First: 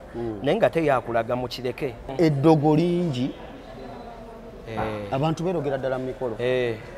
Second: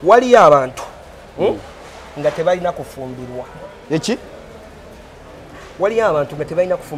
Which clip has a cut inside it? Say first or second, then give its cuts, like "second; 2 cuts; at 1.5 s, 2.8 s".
first; 1 cut; at 2.0 s